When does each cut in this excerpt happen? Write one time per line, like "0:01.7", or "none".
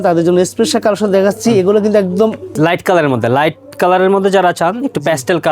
0:02.5